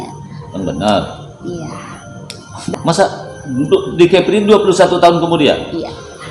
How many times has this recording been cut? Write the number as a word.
one